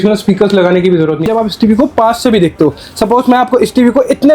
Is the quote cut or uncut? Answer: cut